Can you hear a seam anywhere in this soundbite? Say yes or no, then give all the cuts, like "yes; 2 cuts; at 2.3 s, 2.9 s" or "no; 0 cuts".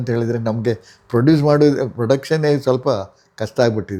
no; 0 cuts